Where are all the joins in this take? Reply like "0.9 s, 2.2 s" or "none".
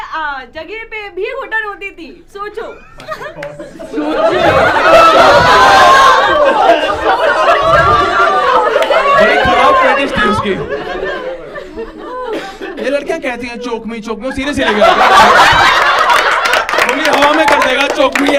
none